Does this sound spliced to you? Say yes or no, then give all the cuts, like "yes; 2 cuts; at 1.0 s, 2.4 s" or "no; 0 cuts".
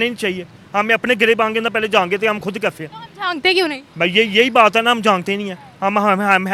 no; 0 cuts